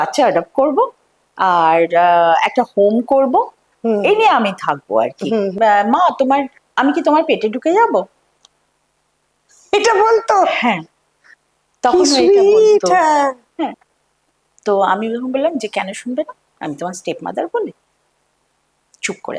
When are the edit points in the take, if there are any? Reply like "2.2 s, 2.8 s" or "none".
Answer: 5.5 s, 13.9 s